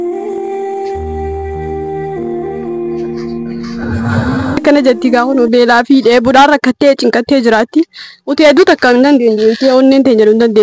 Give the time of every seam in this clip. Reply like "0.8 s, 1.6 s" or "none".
none